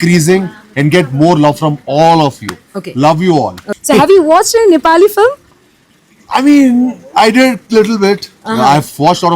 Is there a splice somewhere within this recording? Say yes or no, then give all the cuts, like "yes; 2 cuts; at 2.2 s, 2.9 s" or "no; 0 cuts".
yes; 1 cut; at 3.7 s